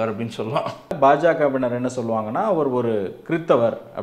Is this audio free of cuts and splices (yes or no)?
no